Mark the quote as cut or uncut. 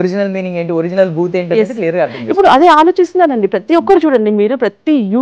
uncut